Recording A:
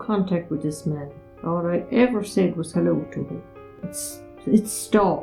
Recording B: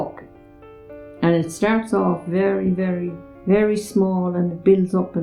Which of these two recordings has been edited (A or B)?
B